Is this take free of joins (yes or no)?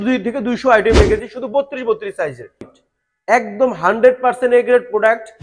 no